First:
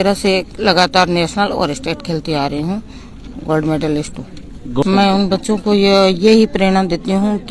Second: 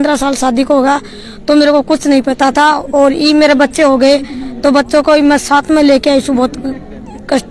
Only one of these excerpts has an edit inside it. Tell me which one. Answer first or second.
first